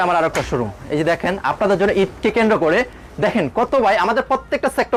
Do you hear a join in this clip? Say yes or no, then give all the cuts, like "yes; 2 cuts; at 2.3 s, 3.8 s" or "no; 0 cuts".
no; 0 cuts